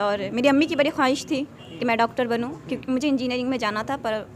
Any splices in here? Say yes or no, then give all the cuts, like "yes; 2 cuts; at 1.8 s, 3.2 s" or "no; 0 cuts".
no; 0 cuts